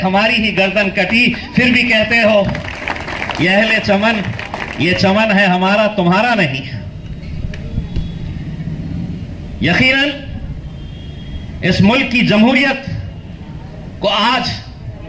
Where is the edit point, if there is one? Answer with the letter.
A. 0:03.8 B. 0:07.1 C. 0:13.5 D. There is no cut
D